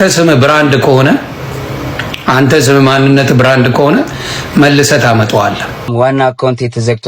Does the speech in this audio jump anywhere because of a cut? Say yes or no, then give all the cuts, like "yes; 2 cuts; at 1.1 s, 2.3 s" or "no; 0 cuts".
yes; 1 cut; at 5.9 s